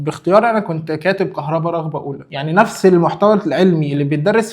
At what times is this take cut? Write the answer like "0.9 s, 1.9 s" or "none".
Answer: 2.2 s